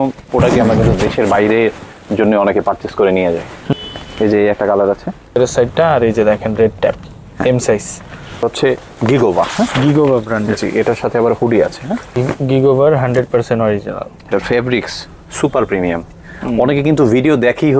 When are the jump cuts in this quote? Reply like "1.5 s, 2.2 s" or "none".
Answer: 3.7 s, 5.4 s, 8.4 s, 12.2 s, 14.3 s